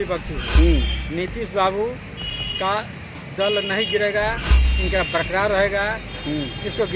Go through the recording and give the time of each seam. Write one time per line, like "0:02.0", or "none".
none